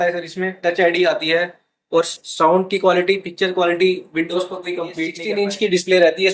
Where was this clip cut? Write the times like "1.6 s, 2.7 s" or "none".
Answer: 5.2 s